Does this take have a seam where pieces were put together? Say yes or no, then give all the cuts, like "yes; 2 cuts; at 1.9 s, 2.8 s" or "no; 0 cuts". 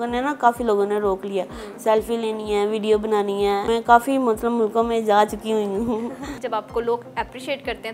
yes; 2 cuts; at 3.7 s, 6.4 s